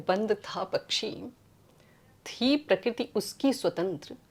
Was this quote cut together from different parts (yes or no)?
no